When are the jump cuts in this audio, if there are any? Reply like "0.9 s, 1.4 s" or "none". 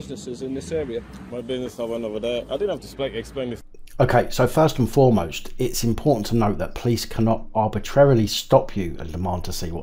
none